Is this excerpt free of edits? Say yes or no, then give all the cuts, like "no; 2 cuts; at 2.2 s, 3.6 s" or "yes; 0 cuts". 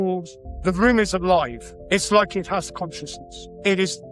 yes; 0 cuts